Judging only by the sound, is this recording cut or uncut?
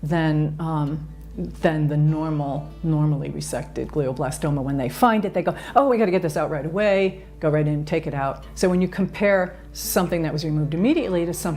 uncut